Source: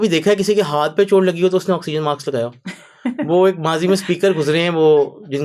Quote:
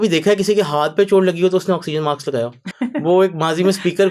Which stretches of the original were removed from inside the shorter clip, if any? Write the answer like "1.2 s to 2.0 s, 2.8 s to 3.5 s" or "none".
2.6 s to 2.9 s